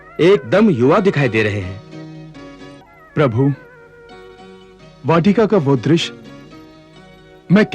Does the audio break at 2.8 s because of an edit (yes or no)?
yes